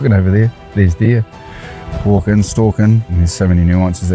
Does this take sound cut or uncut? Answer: cut